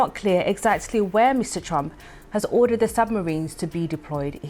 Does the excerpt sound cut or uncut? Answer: uncut